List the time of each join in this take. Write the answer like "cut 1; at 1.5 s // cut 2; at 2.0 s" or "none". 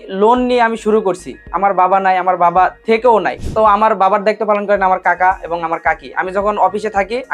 none